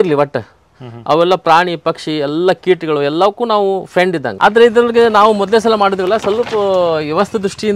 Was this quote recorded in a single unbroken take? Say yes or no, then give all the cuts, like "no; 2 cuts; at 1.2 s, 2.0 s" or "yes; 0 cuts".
no; 1 cut; at 4.3 s